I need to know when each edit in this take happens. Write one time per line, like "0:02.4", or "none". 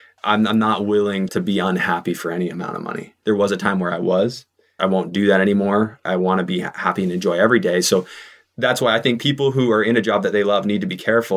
0:01.3
0:03.1
0:04.7